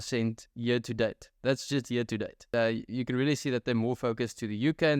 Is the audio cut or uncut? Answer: cut